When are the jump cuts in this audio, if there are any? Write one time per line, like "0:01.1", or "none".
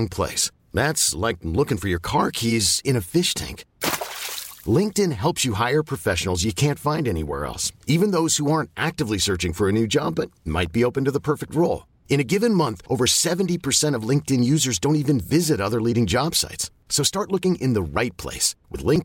none